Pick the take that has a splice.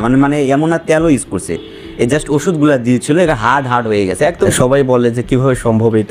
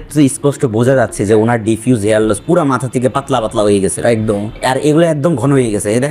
first; 1 cut; at 4.4 s

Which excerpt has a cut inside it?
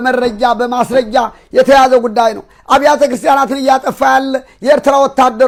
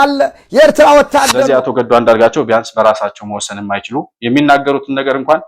second; 1 cut; at 1.5 s

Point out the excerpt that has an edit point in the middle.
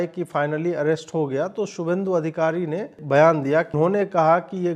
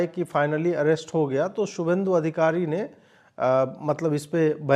first; 2 cuts; at 3.0 s, 3.7 s

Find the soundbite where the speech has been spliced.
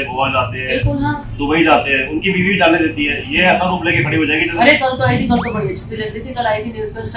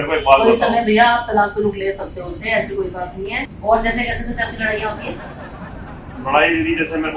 second; 1 cut; at 3.5 s

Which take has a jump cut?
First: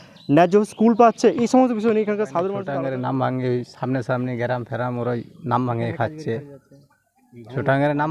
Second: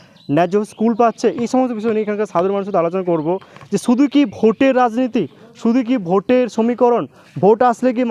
first; 1 cut; at 2.7 s

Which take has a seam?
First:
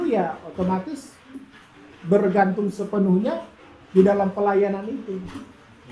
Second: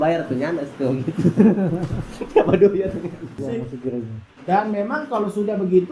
second; 1 cut; at 3.4 s

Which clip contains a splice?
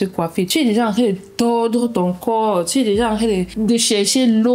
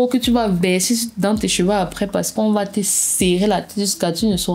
first; 1 cut; at 3.5 s

